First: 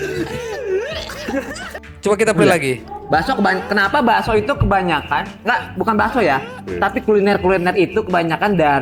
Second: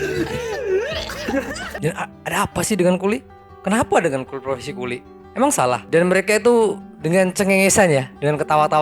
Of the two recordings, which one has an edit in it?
second; 1 cut; at 1.7 s

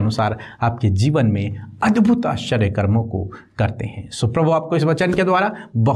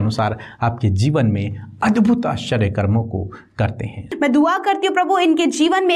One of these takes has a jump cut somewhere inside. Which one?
second; 1 cut; at 4.1 s

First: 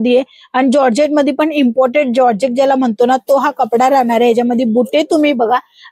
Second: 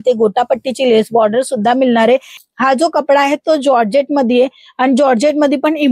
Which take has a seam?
second; 1 cut; at 2.3 s

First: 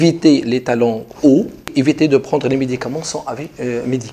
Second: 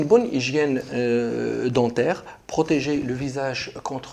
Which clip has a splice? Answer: first; 1 cut; at 1.7 s

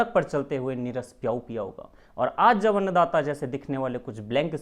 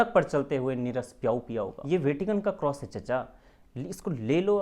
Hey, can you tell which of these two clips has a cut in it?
second; 1 cut; at 1.8 s

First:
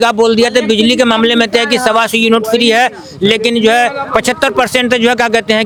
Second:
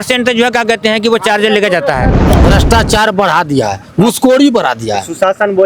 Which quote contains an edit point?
second; 1 cut; at 2.3 s

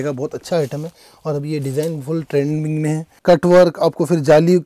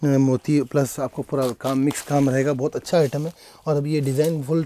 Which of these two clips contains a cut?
first; 1 cut; at 3.2 s

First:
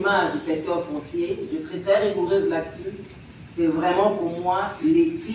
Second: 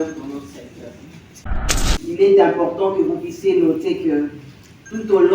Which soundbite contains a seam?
second; 1 cut; at 1.5 s

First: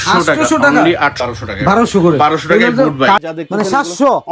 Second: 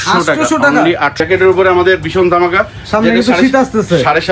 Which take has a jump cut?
first; 2 cuts; at 1.2 s, 3.2 s

